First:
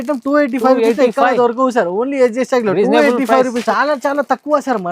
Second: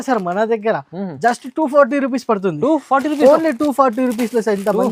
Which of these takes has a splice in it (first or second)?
first